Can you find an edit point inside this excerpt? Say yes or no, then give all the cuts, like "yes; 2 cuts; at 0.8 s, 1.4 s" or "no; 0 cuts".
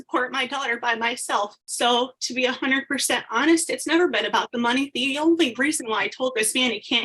yes; 1 cut; at 1.6 s